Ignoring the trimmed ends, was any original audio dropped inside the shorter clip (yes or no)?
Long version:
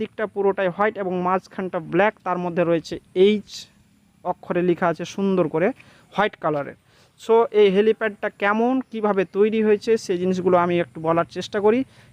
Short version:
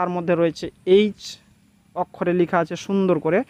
no